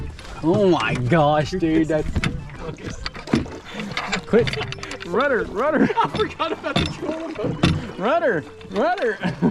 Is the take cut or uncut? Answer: uncut